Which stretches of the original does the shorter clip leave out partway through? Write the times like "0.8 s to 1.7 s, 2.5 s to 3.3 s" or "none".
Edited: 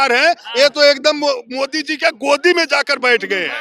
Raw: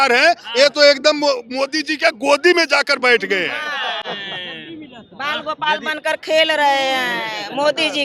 none